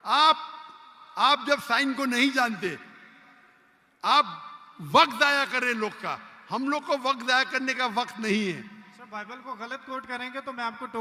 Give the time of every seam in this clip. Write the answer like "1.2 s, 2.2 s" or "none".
none